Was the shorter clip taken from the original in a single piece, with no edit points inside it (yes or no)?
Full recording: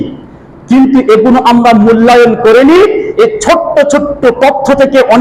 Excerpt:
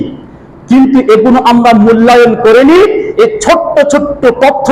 yes